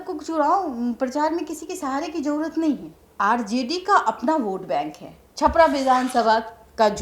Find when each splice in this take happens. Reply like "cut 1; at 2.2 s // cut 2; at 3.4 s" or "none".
cut 1; at 3.0 s // cut 2; at 5.2 s